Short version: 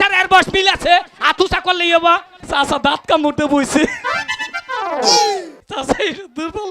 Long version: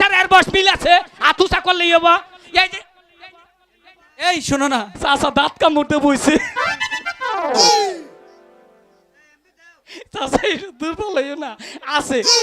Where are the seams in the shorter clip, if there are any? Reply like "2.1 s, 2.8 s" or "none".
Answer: 2.4 s, 5.6 s